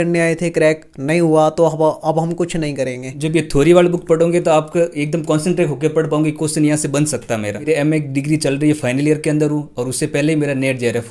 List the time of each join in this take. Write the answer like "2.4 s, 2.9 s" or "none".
3.1 s, 7.7 s

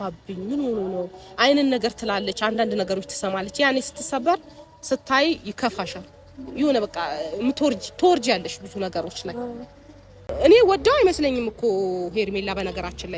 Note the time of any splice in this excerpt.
10.3 s

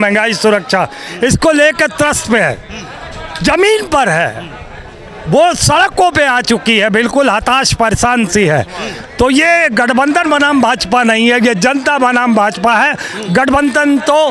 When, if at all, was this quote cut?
none

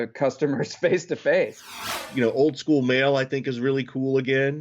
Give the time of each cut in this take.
1.9 s

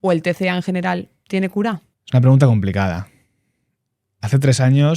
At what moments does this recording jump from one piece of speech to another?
1.9 s

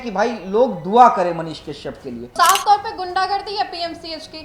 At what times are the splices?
2.3 s

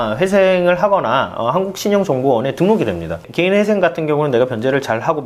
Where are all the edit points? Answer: 3.2 s

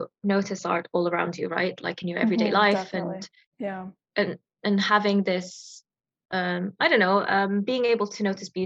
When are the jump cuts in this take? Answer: none

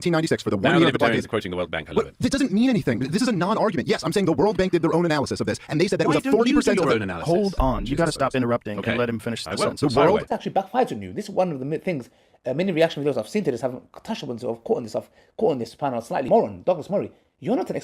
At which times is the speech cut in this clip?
10.3 s, 16.3 s

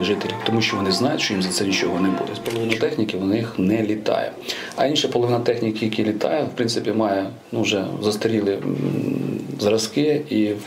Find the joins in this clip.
2.4 s

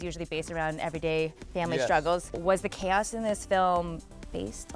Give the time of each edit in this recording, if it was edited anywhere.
2.4 s

